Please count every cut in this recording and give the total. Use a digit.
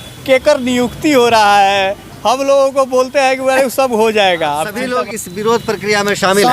1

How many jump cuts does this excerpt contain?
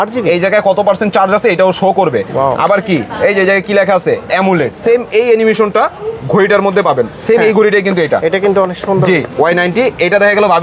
2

